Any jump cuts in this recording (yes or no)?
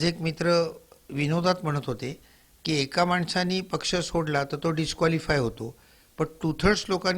no